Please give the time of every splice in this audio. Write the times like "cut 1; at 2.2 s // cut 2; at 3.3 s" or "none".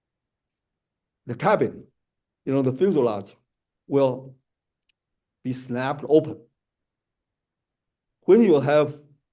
none